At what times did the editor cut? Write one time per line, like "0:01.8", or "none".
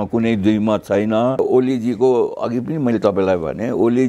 0:01.4